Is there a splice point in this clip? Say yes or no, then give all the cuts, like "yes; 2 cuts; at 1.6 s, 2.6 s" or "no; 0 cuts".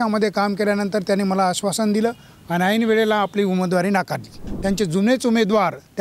yes; 1 cut; at 4.5 s